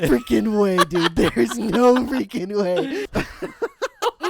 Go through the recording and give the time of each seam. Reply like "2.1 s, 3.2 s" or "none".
3.1 s